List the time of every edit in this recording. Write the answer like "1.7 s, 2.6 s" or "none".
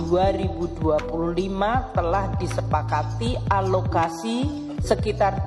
none